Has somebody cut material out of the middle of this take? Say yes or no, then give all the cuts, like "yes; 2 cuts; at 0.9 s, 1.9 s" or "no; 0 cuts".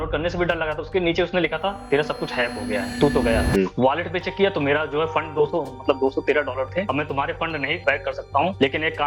yes; 3 cuts; at 3.5 s, 6.8 s, 7.8 s